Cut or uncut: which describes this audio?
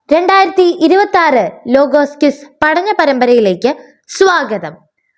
uncut